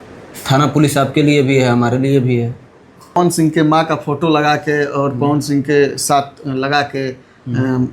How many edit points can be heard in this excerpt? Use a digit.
1